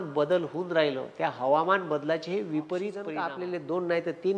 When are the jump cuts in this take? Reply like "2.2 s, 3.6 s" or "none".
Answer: 3.2 s